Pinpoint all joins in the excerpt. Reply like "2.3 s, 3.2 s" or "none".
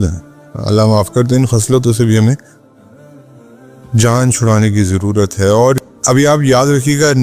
5.8 s